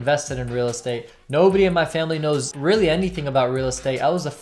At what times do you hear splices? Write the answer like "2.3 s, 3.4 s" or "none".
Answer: 2.5 s